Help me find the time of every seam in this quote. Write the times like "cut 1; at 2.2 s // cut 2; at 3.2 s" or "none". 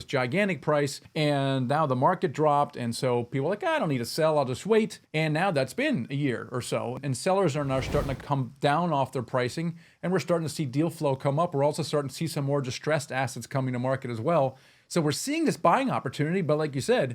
cut 1; at 1.0 s // cut 2; at 7.0 s // cut 3; at 8.2 s

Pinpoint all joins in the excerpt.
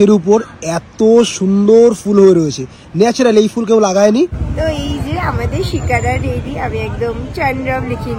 cut 1; at 4.4 s

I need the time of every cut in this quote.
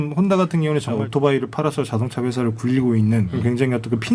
cut 1; at 1.0 s // cut 2; at 3.3 s

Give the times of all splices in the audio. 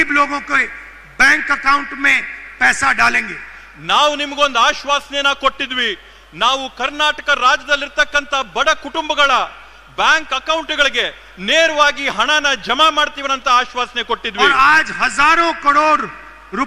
none

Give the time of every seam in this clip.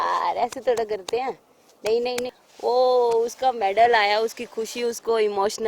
cut 1; at 2.3 s

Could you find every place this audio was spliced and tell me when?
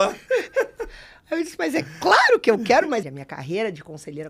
cut 1; at 3.1 s

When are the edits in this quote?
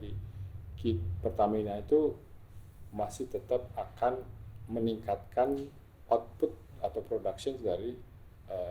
none

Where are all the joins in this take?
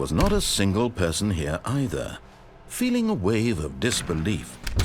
none

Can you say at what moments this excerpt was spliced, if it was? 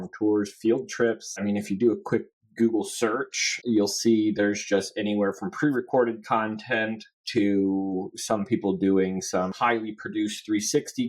cut 1; at 1.4 s // cut 2; at 3.5 s // cut 3; at 9.5 s

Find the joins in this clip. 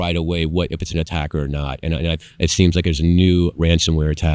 cut 1; at 2.2 s

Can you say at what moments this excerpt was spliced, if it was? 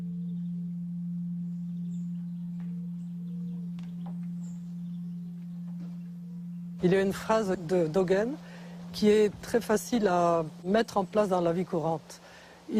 none

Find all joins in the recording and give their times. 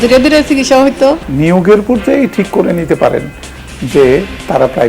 cut 1; at 1.3 s

